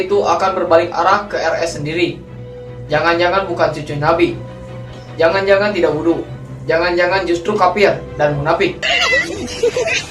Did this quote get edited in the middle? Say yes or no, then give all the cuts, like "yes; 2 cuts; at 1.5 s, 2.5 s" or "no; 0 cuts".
yes; 1 cut; at 8.8 s